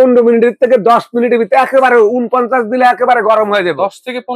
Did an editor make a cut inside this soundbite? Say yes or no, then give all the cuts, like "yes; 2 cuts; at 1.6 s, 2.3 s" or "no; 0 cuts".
no; 0 cuts